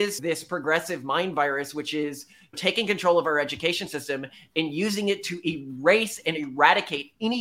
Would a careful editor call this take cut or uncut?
uncut